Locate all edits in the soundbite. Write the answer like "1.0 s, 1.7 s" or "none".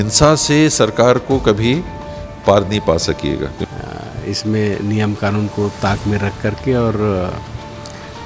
3.6 s